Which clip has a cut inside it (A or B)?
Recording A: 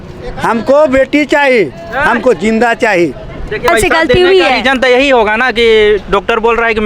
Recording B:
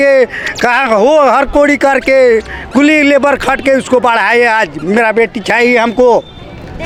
A